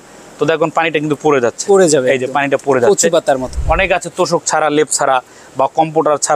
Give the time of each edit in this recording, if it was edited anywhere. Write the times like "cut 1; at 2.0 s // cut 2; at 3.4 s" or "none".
cut 1; at 3.5 s